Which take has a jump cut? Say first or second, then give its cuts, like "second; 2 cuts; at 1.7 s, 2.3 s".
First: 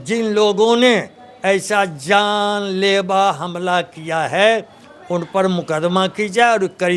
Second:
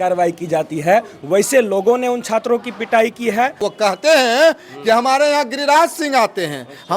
second; 1 cut; at 3.7 s